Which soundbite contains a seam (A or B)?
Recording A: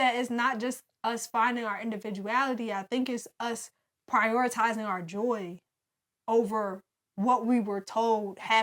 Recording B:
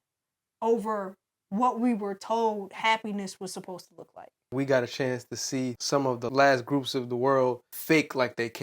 B